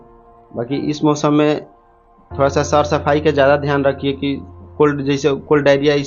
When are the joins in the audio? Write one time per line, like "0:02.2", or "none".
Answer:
none